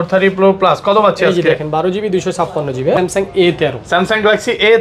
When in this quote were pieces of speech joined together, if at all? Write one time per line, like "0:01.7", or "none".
0:03.0